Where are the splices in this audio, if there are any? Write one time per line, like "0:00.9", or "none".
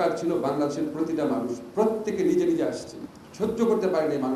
none